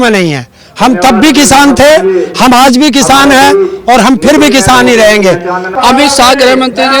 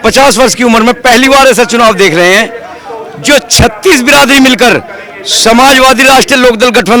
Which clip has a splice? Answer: first; 1 cut; at 5.7 s

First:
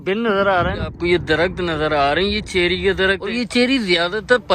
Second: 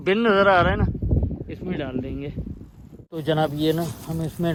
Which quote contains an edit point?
first; 2 cuts; at 0.9 s, 3.4 s

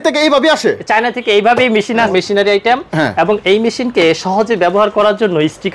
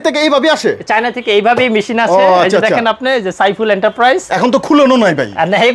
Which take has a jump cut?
first; 1 cut; at 2.1 s

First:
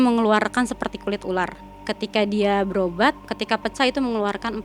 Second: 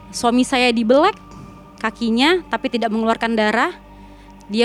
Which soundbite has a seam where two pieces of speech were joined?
first; 2 cuts; at 1.7 s, 3.3 s

